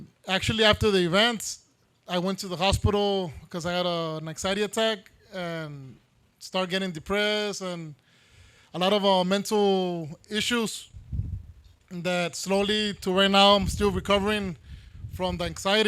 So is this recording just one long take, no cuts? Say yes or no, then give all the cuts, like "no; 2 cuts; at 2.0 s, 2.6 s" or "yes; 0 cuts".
yes; 0 cuts